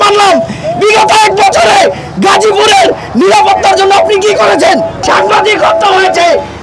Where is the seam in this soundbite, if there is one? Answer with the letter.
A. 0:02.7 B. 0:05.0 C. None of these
B